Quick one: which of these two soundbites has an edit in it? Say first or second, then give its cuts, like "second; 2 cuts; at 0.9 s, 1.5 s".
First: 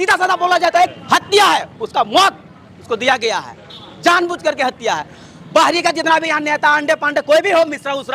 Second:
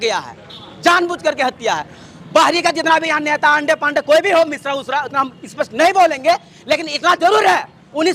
first; 1 cut; at 1.0 s